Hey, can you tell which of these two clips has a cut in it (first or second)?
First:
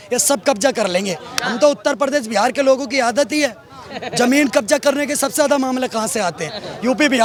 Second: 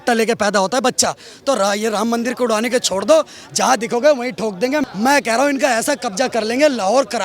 second